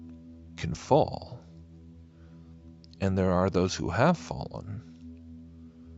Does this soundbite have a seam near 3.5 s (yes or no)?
yes